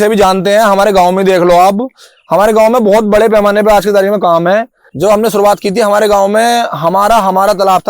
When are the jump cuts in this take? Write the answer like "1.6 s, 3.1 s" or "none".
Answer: 4.8 s